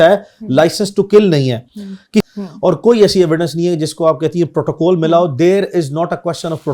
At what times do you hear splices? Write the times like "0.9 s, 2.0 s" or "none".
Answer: 2.2 s